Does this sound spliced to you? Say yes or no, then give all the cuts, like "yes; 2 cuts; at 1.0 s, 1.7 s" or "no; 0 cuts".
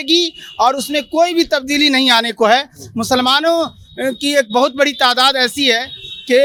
no; 0 cuts